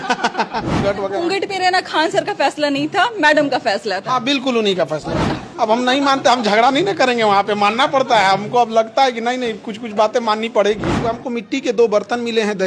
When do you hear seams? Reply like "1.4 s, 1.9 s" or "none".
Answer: 0.8 s, 5.3 s, 11.1 s